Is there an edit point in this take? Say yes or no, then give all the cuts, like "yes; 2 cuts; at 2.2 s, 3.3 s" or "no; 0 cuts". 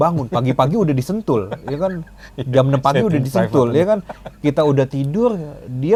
no; 0 cuts